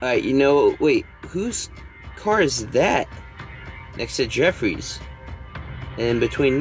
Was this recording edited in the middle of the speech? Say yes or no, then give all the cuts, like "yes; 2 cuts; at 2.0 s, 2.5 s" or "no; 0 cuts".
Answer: no; 0 cuts